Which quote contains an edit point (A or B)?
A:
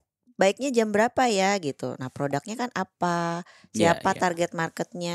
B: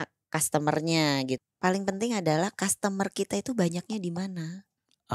B